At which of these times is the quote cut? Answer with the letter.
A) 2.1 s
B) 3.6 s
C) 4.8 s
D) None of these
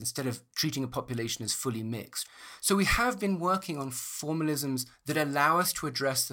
A